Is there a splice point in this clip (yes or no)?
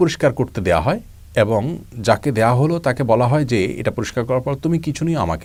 no